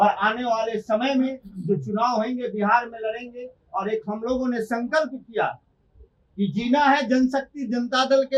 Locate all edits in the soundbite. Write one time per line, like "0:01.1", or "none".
none